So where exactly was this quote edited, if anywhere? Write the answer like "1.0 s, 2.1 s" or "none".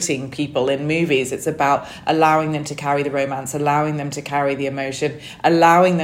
none